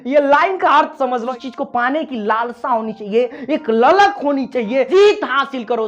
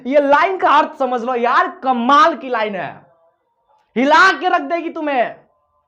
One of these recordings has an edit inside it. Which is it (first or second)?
first